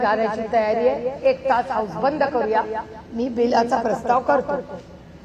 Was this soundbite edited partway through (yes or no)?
no